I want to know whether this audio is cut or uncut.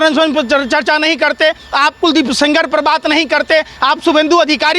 uncut